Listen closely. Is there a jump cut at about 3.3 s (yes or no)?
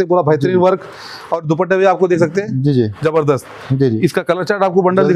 no